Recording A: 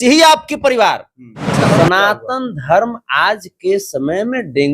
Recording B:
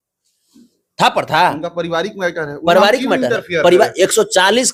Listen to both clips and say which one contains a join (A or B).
A